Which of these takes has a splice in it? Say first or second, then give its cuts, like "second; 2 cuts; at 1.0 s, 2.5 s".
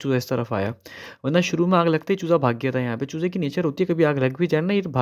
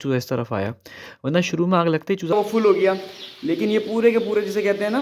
second; 1 cut; at 2.3 s